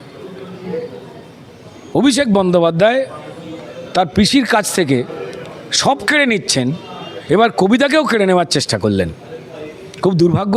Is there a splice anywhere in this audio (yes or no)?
no